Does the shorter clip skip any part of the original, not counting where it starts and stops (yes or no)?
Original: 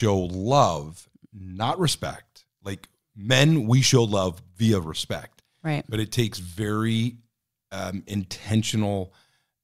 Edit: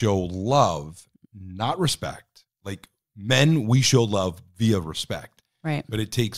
no